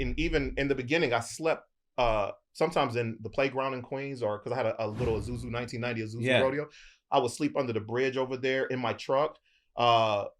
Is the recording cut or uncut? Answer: uncut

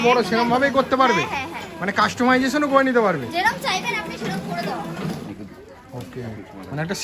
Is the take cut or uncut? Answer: cut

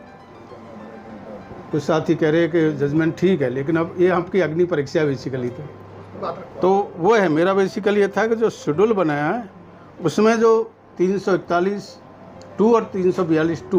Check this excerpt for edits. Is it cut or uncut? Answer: cut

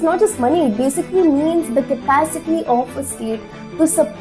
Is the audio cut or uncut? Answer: uncut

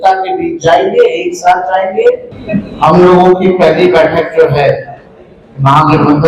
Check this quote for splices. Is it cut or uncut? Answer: cut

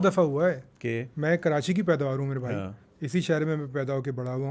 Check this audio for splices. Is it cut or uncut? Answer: uncut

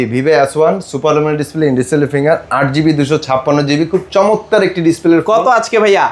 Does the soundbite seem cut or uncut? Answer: uncut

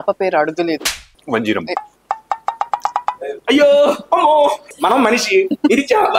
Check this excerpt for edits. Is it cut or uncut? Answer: cut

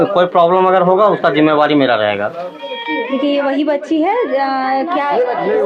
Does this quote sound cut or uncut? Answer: cut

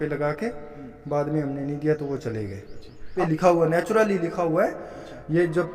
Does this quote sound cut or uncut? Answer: cut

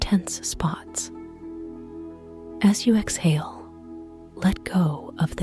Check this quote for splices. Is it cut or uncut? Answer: uncut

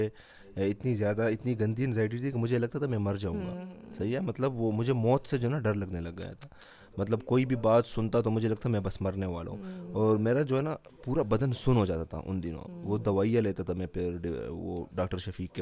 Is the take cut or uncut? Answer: uncut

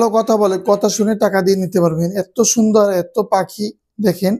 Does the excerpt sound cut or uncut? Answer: uncut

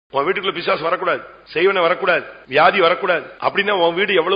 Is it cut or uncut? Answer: cut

